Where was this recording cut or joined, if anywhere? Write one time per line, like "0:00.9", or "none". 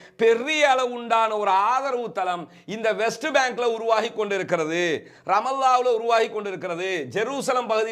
none